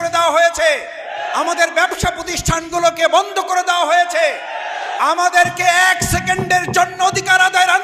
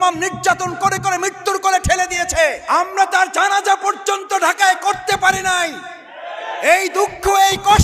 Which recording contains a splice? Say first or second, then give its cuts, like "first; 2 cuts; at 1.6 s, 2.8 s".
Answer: second; 1 cut; at 2.6 s